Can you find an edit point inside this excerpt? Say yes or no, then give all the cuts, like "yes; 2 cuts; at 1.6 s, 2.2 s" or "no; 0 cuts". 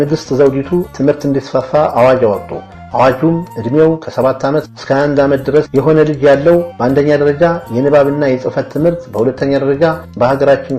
yes; 1 cut; at 0.9 s